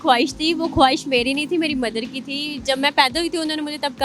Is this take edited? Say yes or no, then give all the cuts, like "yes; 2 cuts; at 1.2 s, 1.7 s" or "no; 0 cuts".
no; 0 cuts